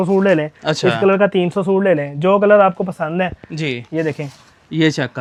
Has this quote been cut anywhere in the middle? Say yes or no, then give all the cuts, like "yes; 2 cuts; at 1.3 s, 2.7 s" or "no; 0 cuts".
no; 0 cuts